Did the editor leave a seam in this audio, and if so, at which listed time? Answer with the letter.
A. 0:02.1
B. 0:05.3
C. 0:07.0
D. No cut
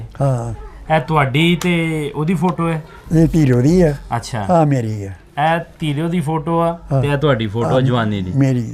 D